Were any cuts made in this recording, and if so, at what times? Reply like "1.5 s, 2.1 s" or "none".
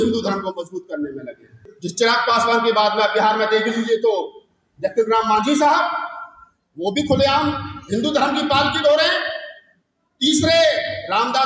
1.7 s